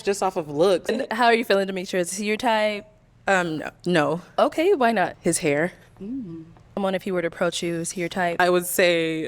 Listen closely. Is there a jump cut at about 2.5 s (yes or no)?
no